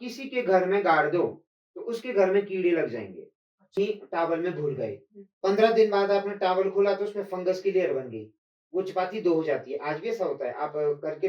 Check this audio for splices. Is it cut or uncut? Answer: cut